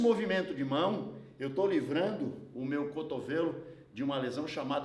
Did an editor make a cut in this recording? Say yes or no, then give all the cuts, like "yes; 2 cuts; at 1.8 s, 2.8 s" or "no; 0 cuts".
no; 0 cuts